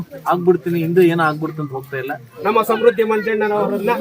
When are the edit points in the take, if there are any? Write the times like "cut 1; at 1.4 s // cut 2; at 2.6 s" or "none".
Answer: cut 1; at 2.3 s